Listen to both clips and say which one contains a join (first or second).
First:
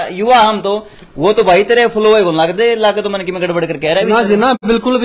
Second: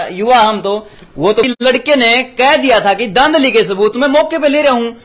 second